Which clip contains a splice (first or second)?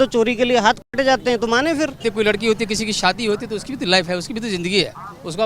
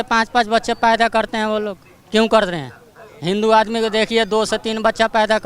first